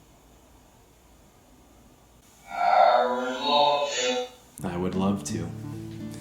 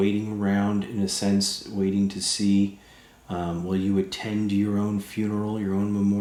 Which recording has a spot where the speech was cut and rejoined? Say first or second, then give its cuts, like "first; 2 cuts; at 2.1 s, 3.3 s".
first; 1 cut; at 2.2 s